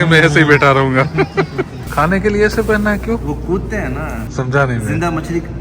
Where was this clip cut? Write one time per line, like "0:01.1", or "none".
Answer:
0:01.8
0:04.2